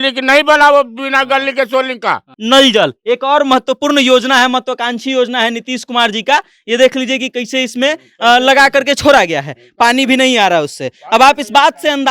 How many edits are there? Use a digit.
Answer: 1